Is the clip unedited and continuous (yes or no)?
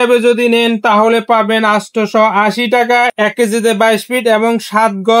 yes